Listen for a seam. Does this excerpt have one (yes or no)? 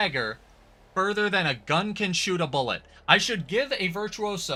no